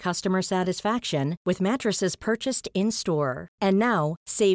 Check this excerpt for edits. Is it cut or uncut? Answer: uncut